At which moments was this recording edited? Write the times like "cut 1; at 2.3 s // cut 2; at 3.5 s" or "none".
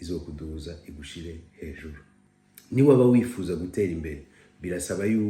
cut 1; at 2.5 s